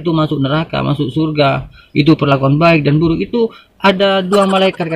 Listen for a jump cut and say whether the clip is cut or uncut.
uncut